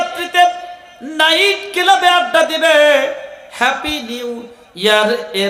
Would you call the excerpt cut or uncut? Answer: uncut